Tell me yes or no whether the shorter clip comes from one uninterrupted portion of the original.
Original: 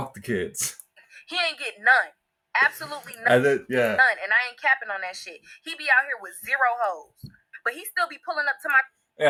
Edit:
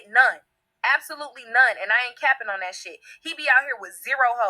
no